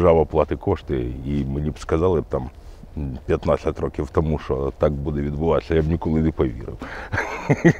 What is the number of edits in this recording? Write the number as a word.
zero